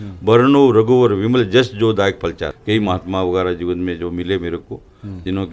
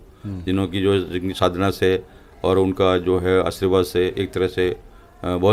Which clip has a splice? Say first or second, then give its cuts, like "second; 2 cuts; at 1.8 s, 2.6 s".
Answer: first; 1 cut; at 2.5 s